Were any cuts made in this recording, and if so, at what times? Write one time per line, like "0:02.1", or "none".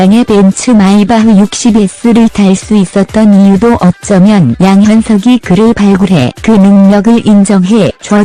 none